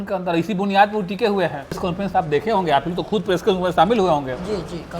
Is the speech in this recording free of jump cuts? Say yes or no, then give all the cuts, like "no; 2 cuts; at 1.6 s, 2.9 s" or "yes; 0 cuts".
no; 1 cut; at 1.9 s